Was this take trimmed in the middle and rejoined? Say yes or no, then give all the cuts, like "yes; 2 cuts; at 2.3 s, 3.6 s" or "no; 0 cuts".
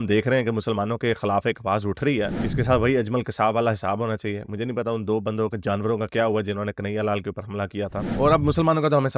yes; 2 cuts; at 2.3 s, 8.1 s